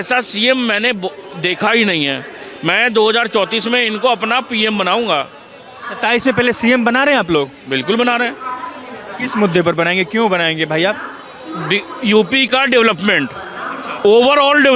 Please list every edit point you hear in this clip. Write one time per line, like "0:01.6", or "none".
none